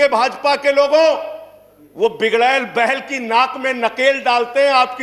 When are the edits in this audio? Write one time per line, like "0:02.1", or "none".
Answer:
none